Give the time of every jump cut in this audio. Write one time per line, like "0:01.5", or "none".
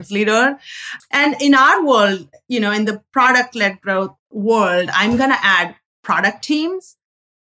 0:04.2